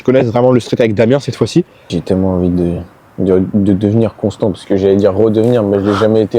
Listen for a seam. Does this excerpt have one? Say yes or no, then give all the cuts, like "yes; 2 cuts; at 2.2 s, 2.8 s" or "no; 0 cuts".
yes; 1 cut; at 2.0 s